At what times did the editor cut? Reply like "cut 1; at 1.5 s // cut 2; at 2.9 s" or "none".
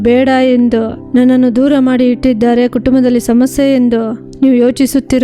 none

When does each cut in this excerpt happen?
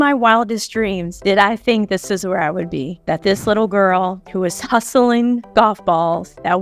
cut 1; at 1.1 s

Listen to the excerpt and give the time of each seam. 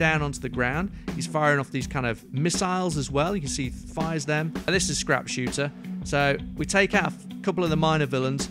cut 1; at 4.7 s

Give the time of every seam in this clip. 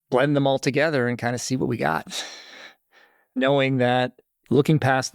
cut 1; at 3.4 s

